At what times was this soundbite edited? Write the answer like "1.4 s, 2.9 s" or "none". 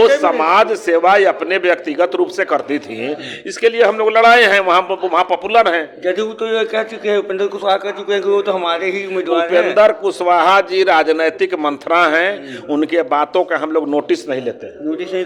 none